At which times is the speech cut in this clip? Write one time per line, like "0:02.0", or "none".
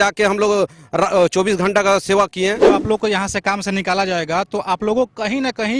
0:02.6